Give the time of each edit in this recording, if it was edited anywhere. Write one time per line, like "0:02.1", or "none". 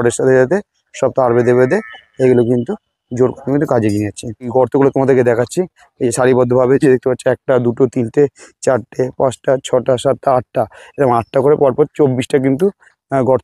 none